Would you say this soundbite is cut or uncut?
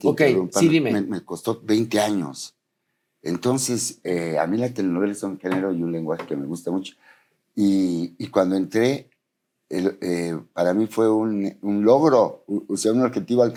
uncut